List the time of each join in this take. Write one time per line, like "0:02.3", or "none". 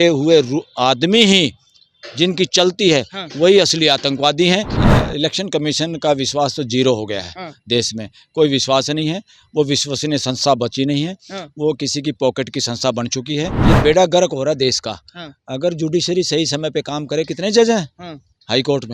0:04.8
0:13.6

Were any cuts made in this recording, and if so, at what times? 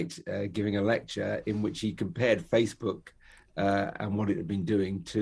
none

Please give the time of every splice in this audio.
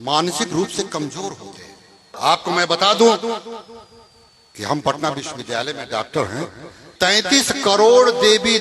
0:02.1
0:06.9

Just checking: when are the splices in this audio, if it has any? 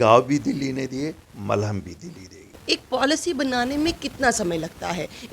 0:02.5

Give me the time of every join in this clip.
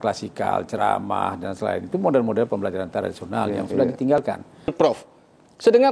0:04.7

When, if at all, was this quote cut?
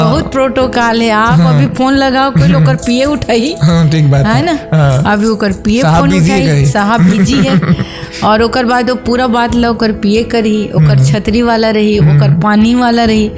none

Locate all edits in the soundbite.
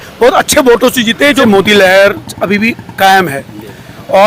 0:01.4

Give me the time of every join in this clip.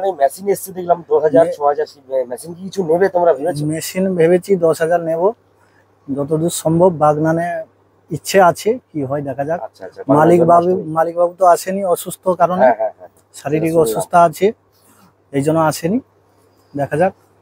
none

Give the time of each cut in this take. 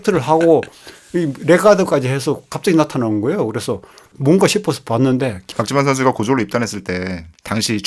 0:05.4

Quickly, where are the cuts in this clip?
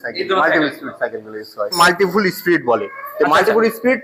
0:01.8

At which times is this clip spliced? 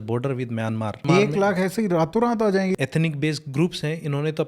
0:01.0
0:02.8

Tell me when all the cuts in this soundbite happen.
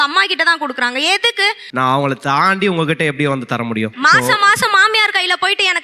0:01.6

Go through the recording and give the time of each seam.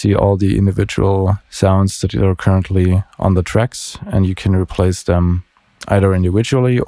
none

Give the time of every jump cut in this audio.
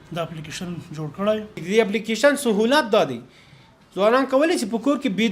0:01.6

